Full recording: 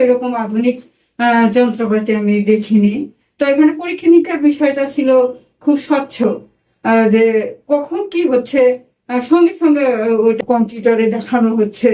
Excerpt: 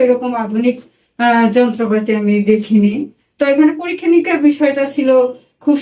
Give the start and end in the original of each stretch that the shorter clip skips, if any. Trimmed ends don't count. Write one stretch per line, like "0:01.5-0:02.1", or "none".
none